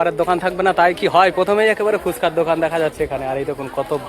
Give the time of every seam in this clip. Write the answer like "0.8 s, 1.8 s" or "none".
none